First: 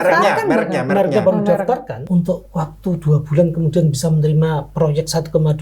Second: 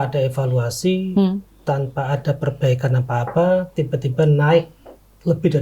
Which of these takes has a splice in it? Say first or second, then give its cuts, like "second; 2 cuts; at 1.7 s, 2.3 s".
first; 1 cut; at 1.9 s